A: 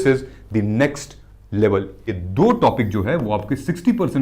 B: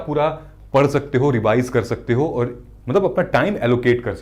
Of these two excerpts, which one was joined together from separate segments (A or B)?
A